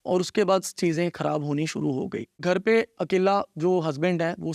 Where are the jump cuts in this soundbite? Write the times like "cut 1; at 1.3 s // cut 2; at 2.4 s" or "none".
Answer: cut 1; at 2.4 s